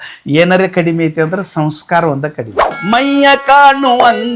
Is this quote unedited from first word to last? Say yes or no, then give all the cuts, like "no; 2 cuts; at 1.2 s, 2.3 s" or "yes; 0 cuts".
no; 1 cut; at 2.8 s